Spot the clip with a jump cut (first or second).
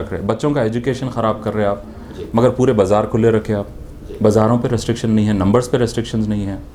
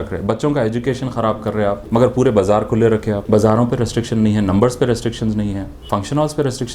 second